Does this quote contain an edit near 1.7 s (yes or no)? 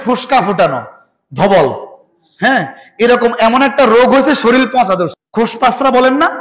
no